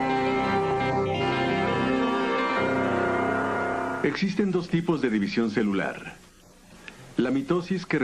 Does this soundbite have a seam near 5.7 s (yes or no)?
yes